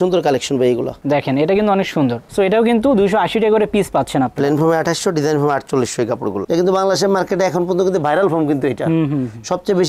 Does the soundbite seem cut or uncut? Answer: cut